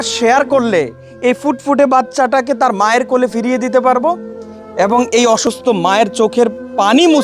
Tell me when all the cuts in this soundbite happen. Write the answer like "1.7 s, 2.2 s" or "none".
5.4 s

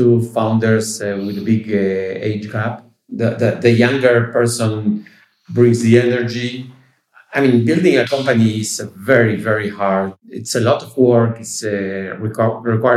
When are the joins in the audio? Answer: 3.2 s

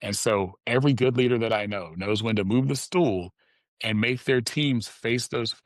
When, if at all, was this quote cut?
none

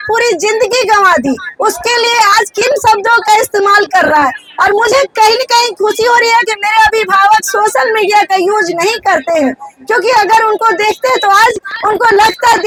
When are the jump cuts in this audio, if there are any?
none

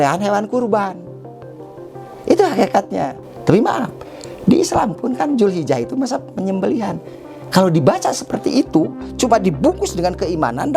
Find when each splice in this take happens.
3.2 s

